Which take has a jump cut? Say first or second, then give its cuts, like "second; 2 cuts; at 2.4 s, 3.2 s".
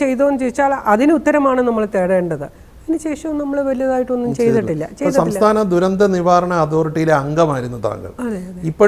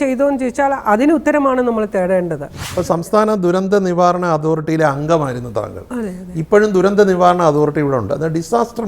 second; 1 cut; at 2.7 s